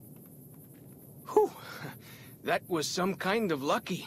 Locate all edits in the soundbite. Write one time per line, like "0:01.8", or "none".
0:01.0